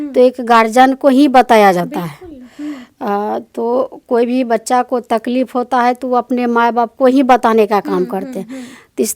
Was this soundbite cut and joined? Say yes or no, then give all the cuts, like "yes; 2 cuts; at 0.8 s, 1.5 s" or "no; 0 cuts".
no; 0 cuts